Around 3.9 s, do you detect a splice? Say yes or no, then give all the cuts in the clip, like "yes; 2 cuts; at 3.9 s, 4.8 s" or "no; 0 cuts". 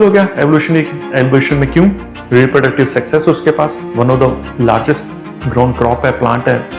no; 0 cuts